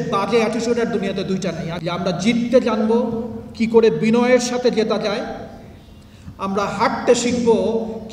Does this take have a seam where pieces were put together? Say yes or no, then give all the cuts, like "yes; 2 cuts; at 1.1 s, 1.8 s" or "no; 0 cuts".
yes; 1 cut; at 1.7 s